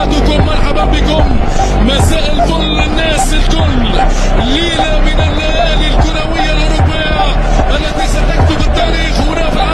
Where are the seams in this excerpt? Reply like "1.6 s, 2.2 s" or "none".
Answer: none